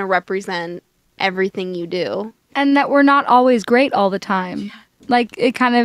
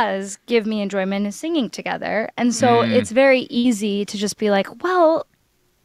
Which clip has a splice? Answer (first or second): first